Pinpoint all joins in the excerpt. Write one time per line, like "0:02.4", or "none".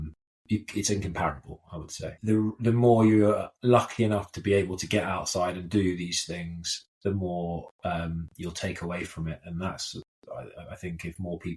0:02.1